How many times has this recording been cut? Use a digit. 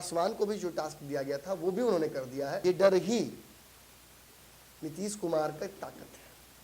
1